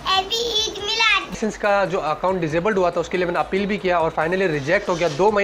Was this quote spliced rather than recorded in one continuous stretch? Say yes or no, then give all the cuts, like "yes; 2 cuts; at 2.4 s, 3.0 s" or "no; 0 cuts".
yes; 1 cut; at 1.3 s